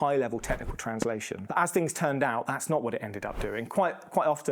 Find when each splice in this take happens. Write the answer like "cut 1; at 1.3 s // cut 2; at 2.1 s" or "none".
cut 1; at 1.5 s